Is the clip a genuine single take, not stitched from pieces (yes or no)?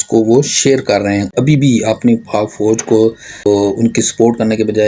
no